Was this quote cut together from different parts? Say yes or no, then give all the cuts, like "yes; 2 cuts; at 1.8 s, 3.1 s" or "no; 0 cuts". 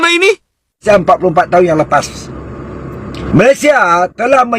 yes; 2 cuts; at 0.8 s, 3.2 s